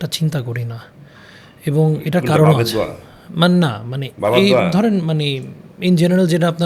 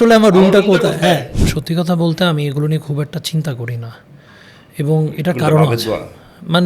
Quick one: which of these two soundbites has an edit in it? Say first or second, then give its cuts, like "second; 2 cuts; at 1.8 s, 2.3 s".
second; 1 cut; at 1.3 s